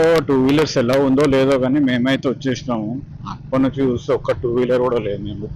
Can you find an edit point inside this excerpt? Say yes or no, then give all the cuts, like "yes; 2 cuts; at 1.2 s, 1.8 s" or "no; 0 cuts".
no; 0 cuts